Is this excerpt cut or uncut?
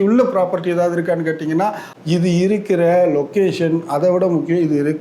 cut